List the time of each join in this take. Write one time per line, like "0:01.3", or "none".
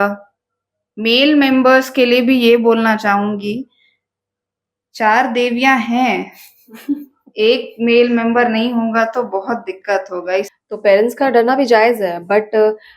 0:10.5